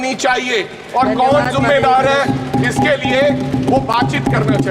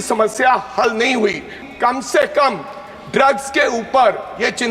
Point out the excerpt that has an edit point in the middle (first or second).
second